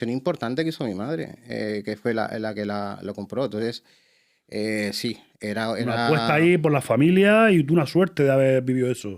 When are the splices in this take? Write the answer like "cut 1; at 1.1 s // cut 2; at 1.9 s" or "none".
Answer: none